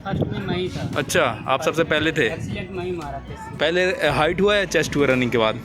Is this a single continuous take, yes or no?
no